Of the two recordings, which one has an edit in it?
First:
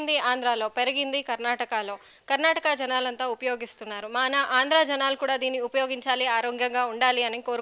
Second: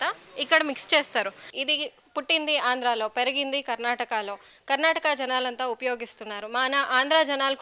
second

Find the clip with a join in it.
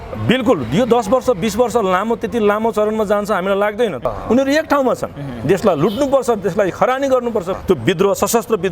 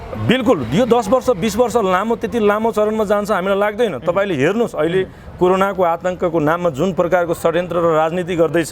first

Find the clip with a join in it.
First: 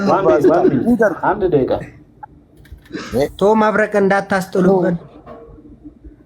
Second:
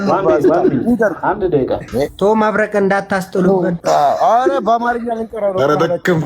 second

